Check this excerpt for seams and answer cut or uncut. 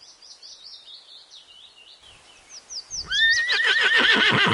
cut